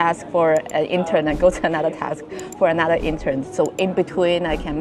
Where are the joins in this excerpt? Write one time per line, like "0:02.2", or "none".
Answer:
none